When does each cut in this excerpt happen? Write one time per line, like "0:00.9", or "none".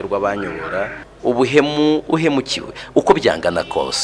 0:01.0